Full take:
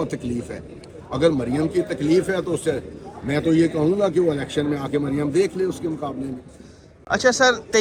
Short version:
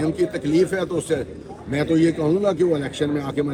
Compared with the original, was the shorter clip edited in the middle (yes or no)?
no